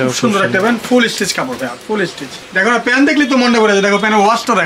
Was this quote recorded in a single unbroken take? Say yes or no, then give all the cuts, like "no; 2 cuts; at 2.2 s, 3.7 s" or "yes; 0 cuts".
no; 1 cut; at 2.4 s